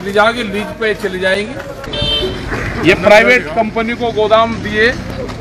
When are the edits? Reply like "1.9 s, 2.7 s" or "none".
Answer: 1.8 s